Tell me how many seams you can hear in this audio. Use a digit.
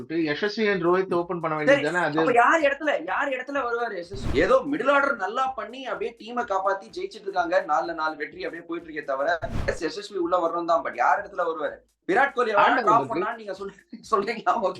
2